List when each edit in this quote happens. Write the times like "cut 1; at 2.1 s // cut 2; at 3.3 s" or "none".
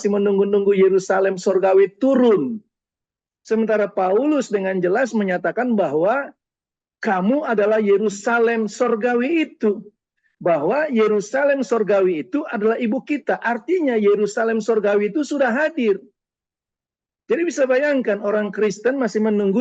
none